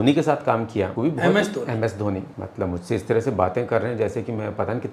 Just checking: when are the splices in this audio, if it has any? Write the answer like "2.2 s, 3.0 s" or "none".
0.9 s, 2.4 s